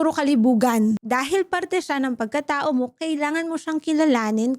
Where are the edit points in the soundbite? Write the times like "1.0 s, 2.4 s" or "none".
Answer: 1.0 s